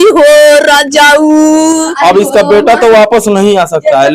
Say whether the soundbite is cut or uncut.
cut